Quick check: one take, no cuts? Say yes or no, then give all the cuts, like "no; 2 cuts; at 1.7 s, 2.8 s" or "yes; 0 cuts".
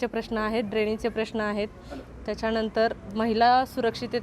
yes; 0 cuts